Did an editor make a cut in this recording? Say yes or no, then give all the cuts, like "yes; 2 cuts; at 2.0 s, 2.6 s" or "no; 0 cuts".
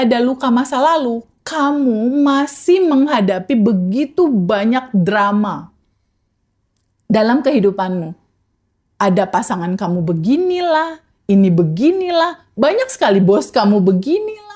no; 0 cuts